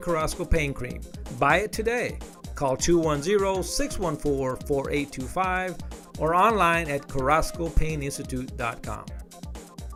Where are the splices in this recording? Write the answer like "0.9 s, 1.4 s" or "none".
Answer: none